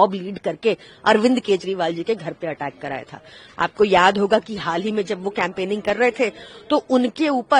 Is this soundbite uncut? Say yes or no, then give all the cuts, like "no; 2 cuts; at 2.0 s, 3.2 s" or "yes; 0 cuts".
yes; 0 cuts